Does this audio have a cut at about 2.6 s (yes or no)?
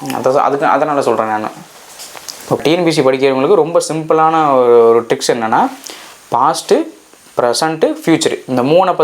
yes